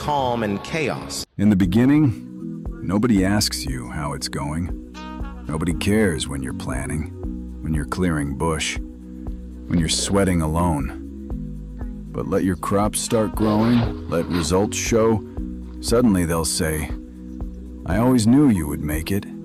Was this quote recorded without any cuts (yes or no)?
yes